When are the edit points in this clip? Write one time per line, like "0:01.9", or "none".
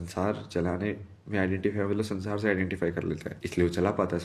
0:03.3